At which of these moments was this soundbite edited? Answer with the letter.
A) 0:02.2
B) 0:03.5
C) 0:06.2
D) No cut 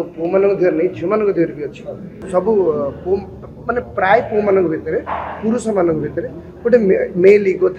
A